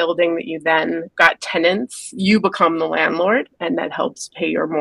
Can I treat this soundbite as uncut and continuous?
no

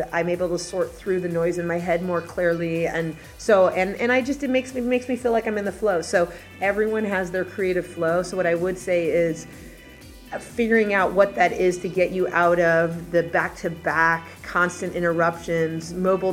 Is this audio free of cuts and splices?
no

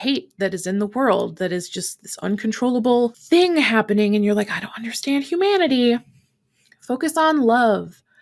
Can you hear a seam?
no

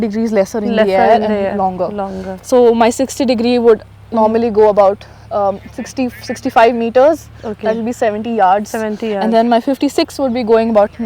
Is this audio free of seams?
yes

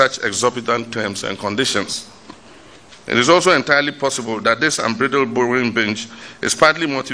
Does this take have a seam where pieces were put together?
no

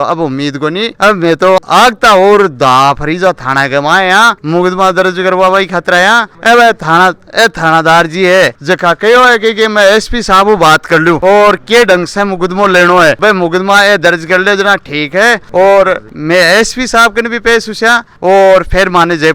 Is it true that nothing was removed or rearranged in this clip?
yes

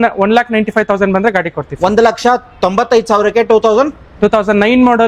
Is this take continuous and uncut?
yes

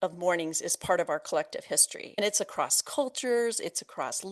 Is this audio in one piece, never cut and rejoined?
no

